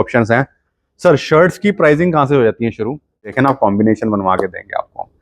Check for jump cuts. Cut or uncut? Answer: cut